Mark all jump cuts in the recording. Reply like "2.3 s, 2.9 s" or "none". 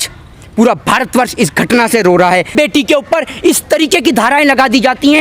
2.5 s